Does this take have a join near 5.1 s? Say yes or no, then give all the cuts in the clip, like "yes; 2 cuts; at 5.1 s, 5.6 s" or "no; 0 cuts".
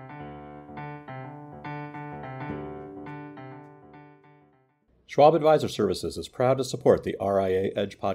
yes; 1 cut; at 5.1 s